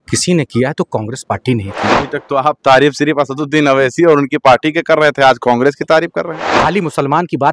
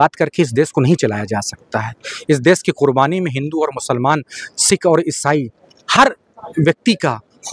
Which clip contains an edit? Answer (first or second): first